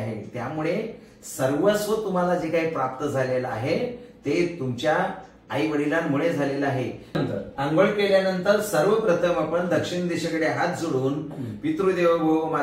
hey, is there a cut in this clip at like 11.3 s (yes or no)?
no